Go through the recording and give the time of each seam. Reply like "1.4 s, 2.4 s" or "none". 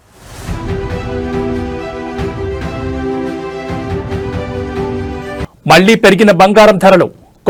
none